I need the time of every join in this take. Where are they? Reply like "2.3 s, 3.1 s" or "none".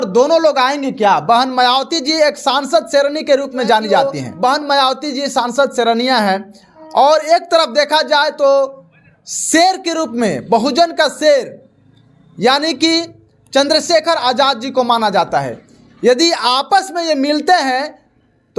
4.2 s